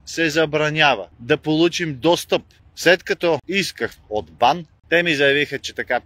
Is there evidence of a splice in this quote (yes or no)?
yes